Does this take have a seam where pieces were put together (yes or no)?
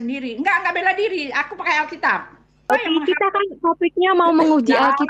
yes